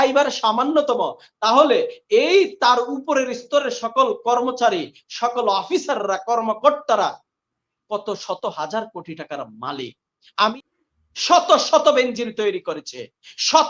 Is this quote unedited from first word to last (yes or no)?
no